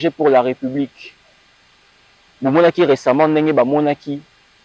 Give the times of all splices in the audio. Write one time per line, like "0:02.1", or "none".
none

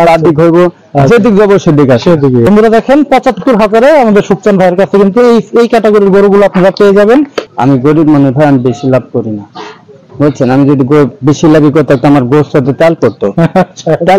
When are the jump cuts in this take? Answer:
0:02.5
0:07.4

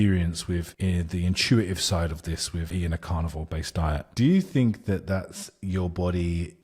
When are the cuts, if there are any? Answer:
0:02.7
0:04.1

